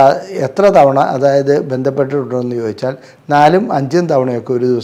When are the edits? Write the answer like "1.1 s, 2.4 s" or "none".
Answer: none